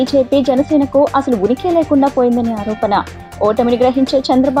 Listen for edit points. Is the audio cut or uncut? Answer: uncut